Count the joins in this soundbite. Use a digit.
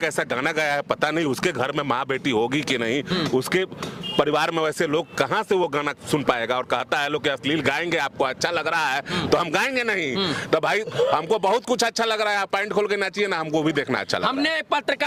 0